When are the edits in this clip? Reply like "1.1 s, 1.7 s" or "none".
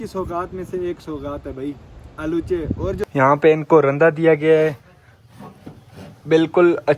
3.0 s